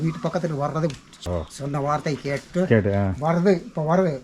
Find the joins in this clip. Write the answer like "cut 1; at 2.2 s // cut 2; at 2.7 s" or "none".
cut 1; at 1.3 s